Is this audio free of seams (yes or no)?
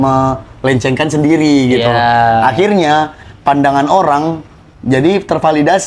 yes